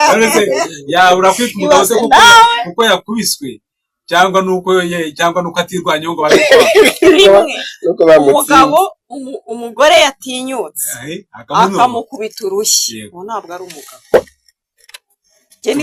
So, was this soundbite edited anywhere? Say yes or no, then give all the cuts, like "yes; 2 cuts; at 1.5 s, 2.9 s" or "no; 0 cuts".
no; 0 cuts